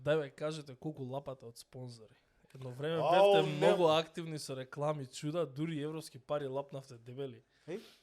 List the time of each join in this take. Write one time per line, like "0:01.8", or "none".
none